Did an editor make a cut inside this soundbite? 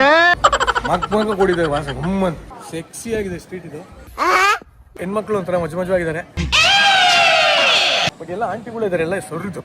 yes; 2 cuts; at 2.5 s, 5.1 s

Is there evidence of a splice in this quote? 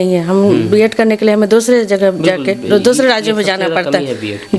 no; 0 cuts

